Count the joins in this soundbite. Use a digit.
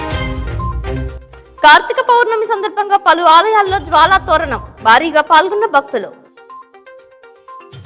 0